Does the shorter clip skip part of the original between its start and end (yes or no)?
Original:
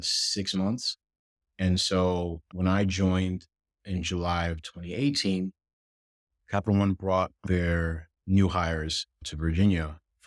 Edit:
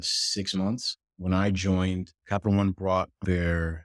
yes